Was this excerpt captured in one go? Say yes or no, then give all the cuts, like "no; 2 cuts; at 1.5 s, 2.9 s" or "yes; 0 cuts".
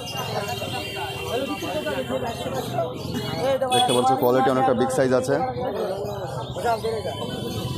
yes; 0 cuts